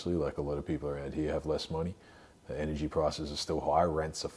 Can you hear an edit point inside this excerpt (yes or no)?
no